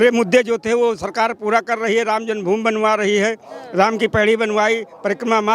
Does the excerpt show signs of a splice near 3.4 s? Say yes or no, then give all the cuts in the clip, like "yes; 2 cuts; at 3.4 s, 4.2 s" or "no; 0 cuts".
no; 0 cuts